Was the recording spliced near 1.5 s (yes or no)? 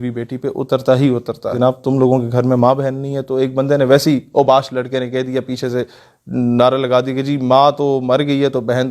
yes